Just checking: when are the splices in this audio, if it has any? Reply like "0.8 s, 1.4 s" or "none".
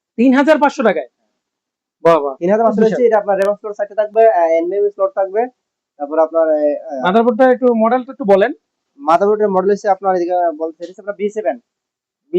none

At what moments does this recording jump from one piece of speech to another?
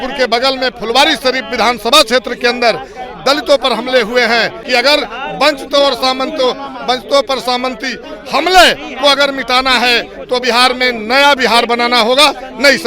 4.6 s

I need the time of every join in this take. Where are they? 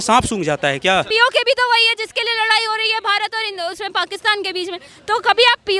1.1 s

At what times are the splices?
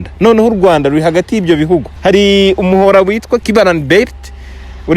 1.9 s, 3.4 s

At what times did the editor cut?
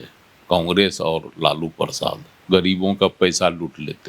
2.3 s

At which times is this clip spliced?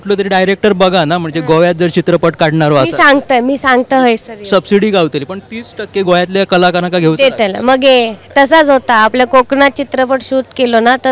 none

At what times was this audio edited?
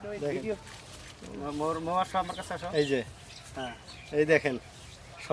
none

